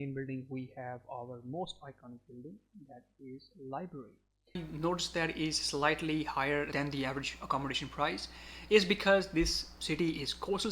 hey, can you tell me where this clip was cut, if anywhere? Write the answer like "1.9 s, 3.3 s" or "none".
4.7 s, 6.7 s